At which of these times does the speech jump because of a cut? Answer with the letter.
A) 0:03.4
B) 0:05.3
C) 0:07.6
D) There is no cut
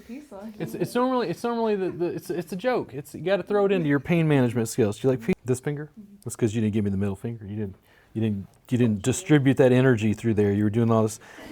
B